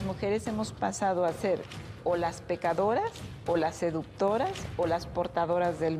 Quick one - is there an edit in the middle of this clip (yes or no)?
no